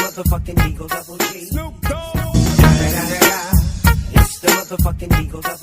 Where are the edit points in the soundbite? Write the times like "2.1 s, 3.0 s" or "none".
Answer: 1.1 s, 2.0 s

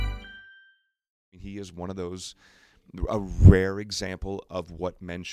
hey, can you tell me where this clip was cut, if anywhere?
1.4 s

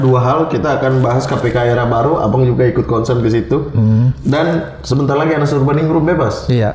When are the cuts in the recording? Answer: none

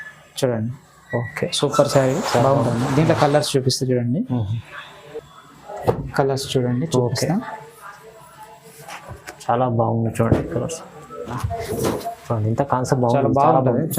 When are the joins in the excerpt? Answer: 11.4 s

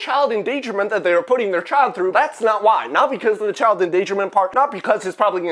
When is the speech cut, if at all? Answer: 2.1 s, 4.5 s

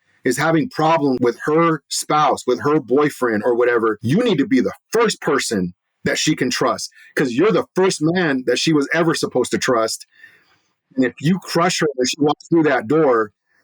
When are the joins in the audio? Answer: 1.2 s, 4.0 s

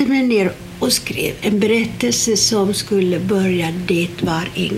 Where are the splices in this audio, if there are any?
1.1 s

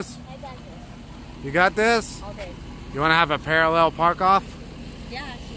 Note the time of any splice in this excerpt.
none

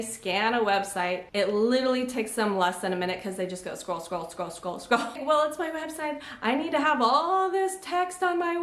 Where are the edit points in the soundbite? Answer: 1.2 s, 5.2 s

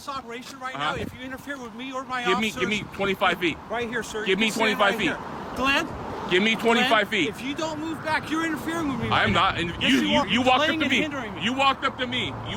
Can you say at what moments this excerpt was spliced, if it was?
none

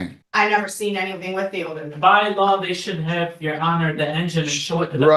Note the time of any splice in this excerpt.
none

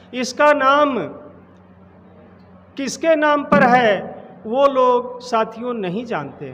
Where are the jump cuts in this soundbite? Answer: none

